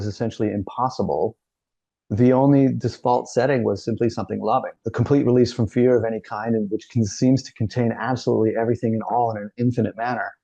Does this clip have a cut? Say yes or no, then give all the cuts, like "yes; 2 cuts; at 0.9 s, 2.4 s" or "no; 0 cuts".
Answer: yes; 1 cut; at 4.8 s